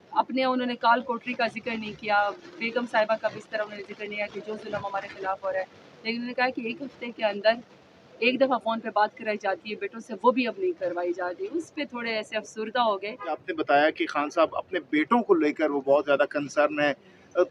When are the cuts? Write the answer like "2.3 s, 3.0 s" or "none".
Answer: 13.4 s